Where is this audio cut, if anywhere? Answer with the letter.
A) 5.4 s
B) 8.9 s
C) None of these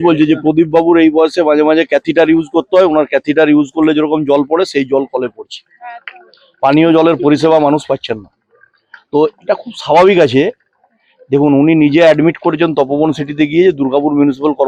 C